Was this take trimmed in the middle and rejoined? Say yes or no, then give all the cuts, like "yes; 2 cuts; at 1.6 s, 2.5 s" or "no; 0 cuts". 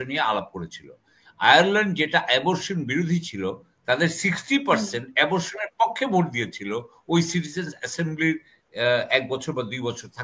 no; 0 cuts